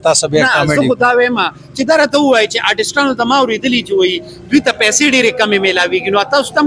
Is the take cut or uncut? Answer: uncut